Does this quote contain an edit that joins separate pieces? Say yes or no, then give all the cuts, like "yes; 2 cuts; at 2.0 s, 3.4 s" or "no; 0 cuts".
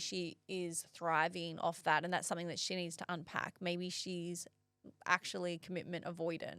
no; 0 cuts